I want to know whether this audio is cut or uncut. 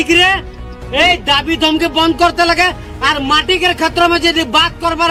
uncut